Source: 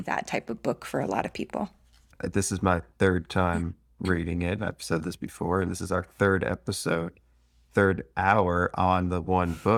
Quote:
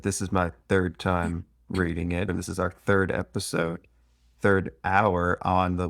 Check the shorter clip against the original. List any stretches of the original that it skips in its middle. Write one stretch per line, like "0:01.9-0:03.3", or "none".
0:04.6-0:05.6